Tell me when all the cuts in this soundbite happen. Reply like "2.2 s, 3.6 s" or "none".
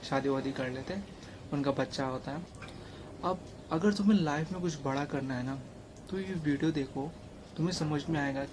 2.4 s